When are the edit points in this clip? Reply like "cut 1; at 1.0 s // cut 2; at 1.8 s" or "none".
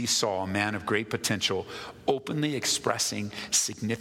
none